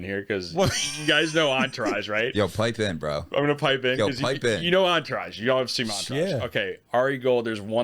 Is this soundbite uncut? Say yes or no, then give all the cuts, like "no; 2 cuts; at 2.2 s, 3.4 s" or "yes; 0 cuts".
yes; 0 cuts